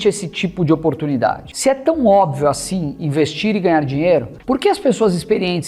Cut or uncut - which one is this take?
cut